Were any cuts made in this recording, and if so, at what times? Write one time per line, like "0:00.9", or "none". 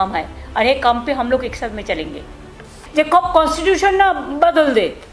0:02.8